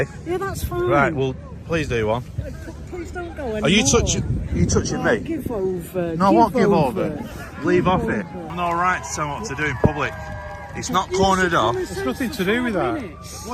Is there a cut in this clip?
yes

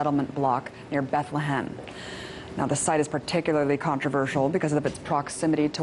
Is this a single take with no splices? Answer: yes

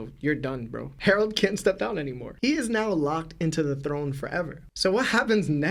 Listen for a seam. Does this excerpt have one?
no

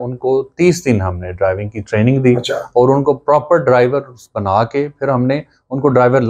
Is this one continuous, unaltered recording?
yes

